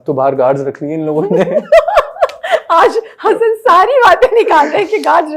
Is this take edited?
no; 0 cuts

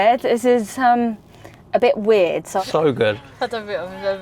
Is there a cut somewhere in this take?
yes; 1 cut; at 2.6 s

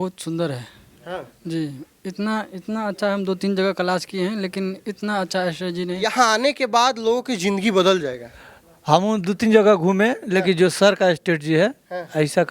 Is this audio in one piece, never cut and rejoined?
no; 1 cut; at 6.0 s

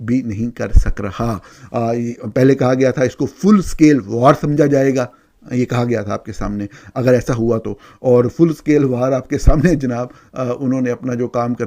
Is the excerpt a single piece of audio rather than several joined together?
yes; 0 cuts

